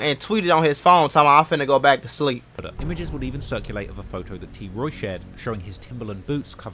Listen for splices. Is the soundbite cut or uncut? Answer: cut